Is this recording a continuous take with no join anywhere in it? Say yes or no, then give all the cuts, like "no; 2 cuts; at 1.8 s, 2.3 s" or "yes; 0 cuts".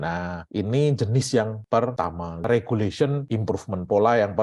no; 2 cuts; at 1.8 s, 3.2 s